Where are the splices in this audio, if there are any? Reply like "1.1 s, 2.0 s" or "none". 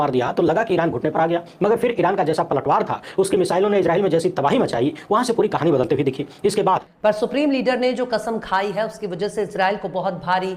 6.9 s

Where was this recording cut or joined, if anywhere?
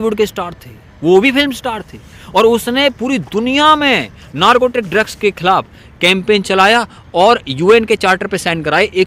none

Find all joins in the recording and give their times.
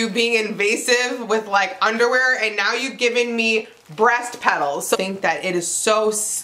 5.0 s

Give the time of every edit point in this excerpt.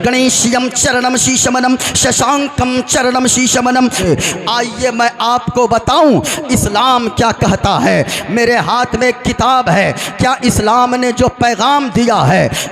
4.0 s

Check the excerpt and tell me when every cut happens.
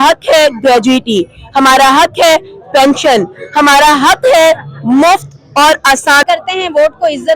6.2 s

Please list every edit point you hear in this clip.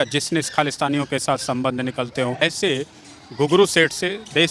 2.4 s

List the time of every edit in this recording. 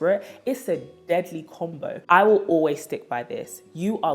2.0 s

